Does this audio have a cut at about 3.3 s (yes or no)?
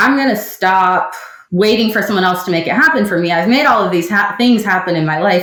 no